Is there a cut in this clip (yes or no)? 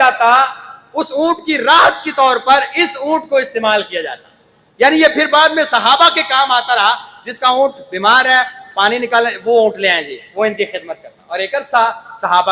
no